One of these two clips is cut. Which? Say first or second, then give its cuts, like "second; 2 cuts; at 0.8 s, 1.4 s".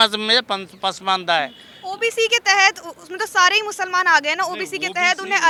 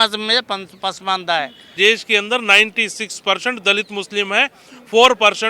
second; 1 cut; at 1.8 s